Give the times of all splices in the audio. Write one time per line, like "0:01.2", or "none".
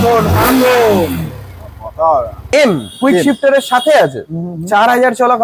0:02.4